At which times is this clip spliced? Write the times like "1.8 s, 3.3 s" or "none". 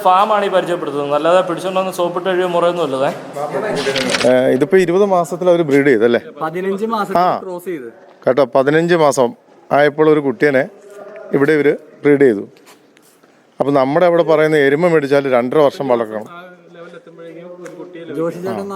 4.1 s